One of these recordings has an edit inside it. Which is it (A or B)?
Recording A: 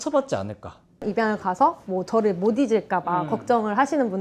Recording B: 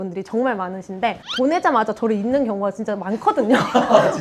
A